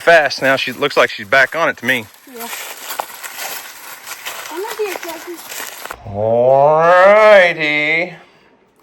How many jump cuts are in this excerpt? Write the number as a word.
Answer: one